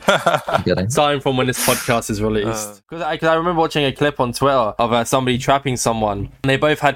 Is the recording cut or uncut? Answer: cut